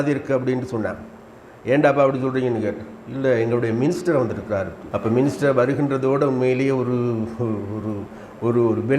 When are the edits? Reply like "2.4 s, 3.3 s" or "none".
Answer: 4.8 s